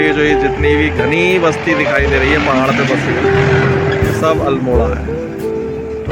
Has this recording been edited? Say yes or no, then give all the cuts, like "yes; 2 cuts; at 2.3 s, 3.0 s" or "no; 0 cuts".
no; 0 cuts